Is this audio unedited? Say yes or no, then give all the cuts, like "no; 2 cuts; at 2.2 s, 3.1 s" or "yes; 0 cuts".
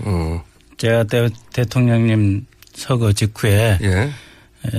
no; 1 cut; at 3.2 s